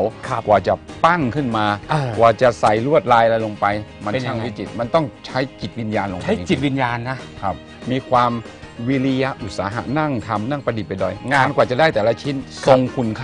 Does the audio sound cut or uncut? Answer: uncut